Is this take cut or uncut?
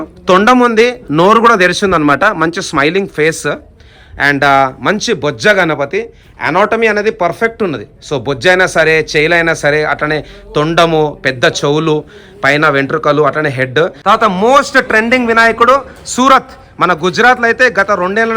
cut